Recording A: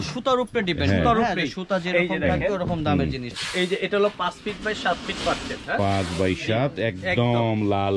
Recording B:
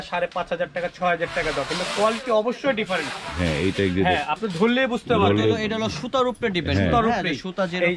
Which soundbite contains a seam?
A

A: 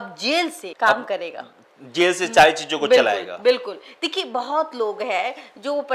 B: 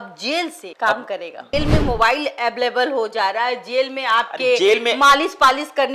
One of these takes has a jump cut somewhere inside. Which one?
B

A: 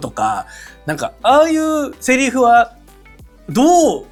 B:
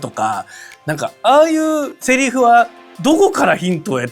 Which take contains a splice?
B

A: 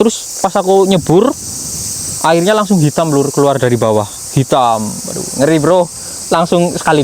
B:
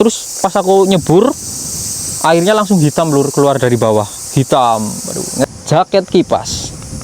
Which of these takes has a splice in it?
B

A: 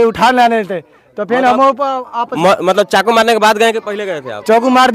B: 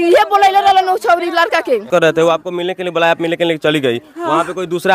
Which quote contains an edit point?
B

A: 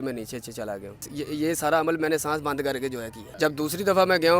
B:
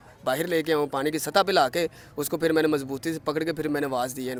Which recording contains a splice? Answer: A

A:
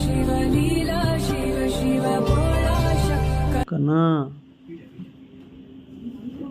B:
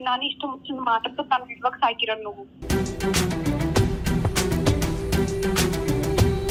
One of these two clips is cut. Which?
A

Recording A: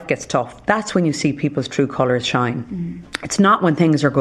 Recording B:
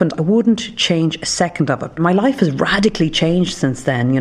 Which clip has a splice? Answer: B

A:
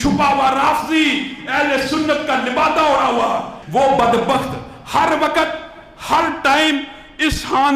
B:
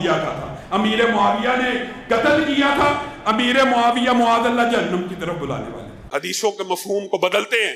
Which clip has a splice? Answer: B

